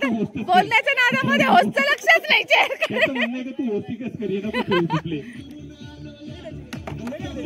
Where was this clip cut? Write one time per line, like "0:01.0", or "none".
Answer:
none